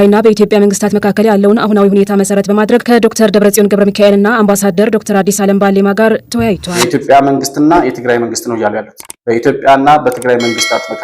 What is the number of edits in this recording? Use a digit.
1